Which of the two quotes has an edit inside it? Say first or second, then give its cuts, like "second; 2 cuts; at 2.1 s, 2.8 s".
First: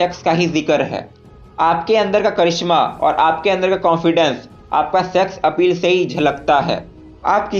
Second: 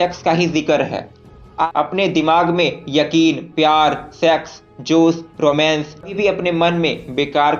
second; 2 cuts; at 1.7 s, 6.1 s